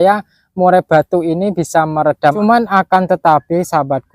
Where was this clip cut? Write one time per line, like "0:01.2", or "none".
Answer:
0:02.4

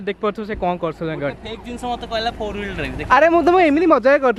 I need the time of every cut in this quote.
none

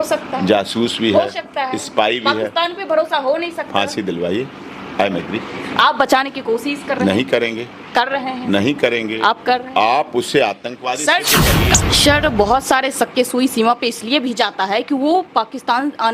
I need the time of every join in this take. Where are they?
0:11.8

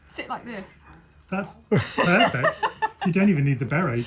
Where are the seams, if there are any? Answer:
none

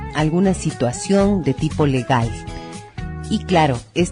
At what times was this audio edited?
0:01.3

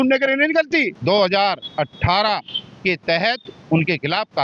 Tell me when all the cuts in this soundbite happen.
0:00.9

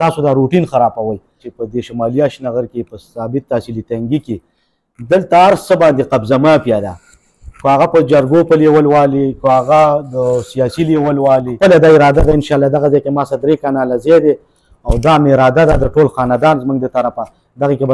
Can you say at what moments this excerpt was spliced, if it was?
0:01.5
0:11.5

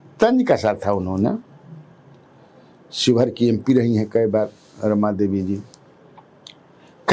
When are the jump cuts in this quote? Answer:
none

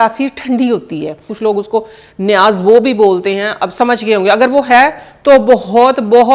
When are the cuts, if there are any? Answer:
0:01.3

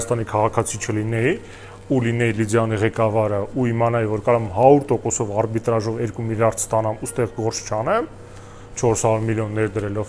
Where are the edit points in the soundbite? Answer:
none

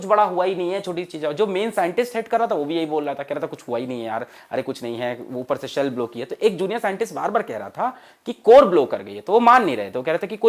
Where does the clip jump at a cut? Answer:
none

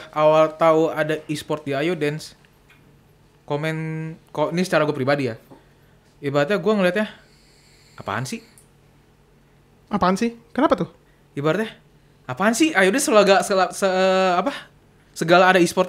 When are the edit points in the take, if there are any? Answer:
none

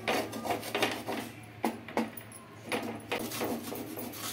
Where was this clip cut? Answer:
0:03.2

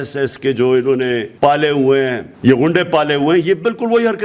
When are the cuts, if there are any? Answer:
0:01.3
0:02.3

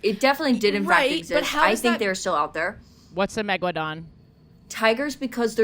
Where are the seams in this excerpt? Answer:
none

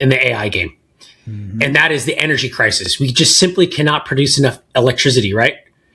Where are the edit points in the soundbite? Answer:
none

